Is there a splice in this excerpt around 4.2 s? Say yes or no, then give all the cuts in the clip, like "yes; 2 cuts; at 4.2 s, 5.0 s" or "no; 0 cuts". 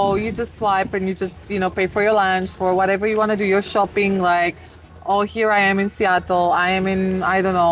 no; 0 cuts